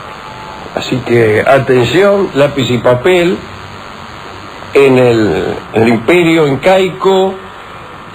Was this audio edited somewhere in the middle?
no; 0 cuts

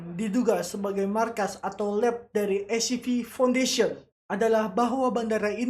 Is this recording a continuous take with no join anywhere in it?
no; 1 cut; at 4.2 s

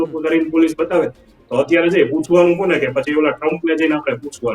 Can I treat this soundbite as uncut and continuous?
no; 1 cut; at 1.2 s

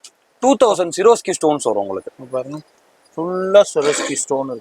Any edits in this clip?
no; 0 cuts

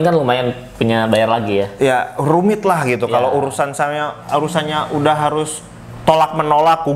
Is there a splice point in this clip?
no; 0 cuts

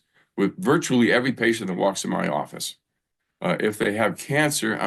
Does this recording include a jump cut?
no; 0 cuts

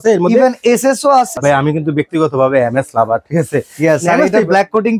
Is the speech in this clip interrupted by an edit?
yes; 1 cut; at 1.3 s

